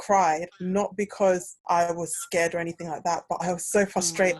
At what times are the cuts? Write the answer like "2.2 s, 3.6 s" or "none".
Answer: 1.5 s